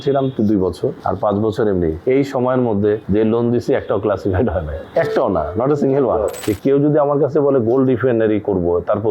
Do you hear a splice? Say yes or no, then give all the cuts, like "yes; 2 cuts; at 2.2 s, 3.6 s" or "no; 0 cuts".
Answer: yes; 5 cuts; at 1.0 s, 2.0 s, 3.0 s, 4.8 s, 6.4 s